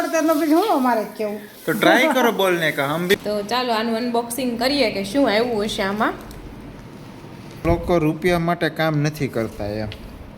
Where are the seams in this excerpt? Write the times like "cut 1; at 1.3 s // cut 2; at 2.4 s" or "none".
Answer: cut 1; at 3.1 s // cut 2; at 7.6 s